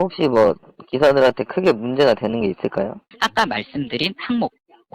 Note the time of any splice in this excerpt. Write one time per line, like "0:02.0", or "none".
0:03.1

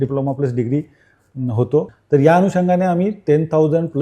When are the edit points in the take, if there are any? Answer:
0:01.9

